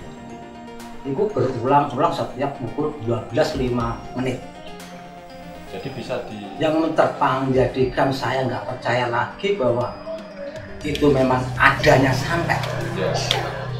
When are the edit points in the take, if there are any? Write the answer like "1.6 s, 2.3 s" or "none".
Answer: 6.4 s